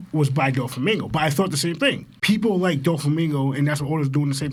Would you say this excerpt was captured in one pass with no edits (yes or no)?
yes